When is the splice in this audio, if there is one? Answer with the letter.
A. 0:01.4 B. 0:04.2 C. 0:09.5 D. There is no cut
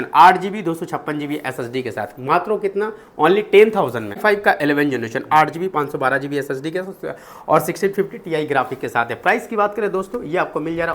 B